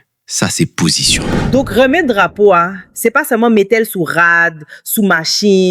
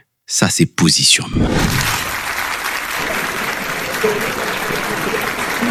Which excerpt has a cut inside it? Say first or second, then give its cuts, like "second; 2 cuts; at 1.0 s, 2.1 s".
first; 1 cut; at 1.3 s